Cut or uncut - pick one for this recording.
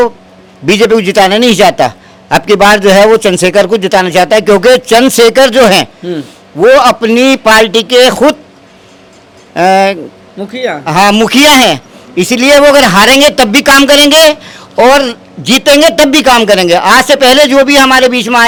uncut